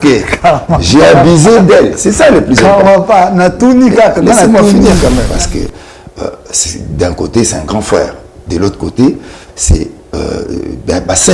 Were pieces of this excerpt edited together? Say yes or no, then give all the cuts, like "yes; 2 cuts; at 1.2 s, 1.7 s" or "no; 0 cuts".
yes; 1 cut; at 5.3 s